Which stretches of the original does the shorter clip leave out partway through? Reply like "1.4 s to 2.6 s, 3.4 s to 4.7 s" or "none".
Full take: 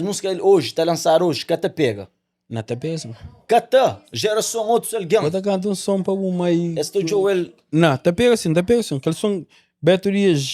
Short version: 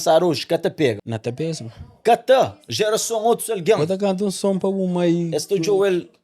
2.1 s to 2.5 s